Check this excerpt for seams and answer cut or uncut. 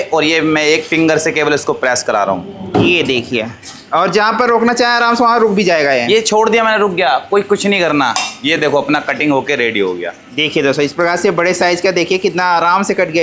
uncut